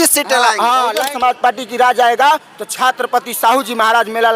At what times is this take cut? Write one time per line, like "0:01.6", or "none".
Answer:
0:01.0